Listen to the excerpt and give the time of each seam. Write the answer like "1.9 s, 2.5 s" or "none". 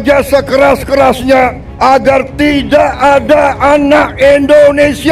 1.6 s